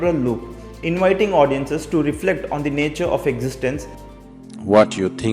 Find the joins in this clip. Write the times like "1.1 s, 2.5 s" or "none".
3.9 s